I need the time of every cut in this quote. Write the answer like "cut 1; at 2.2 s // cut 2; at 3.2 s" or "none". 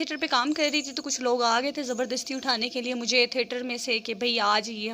none